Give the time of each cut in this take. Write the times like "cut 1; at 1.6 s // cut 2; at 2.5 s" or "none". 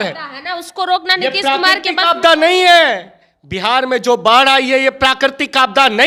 none